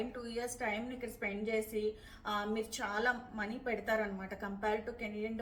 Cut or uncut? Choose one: uncut